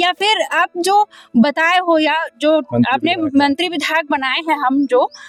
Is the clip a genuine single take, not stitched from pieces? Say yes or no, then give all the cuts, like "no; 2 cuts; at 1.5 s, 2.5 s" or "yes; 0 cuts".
yes; 0 cuts